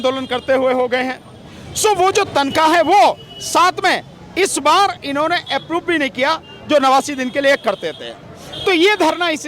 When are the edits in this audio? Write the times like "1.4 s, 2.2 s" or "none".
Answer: none